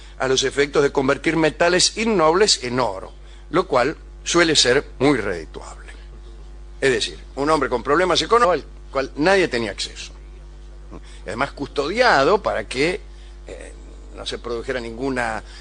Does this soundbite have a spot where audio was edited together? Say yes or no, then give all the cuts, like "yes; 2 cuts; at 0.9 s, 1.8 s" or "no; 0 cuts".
no; 0 cuts